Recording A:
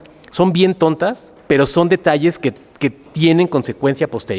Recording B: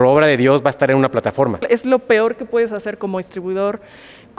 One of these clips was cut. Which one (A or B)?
B